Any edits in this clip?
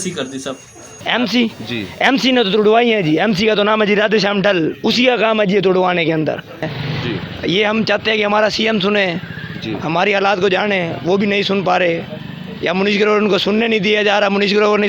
yes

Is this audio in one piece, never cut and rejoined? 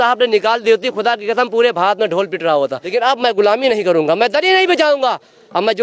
no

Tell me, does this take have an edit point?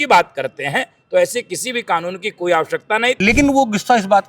yes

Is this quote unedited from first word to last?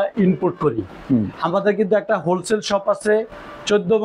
yes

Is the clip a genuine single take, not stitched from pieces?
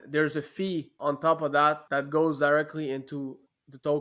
no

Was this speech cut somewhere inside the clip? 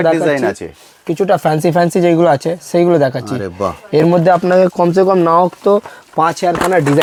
no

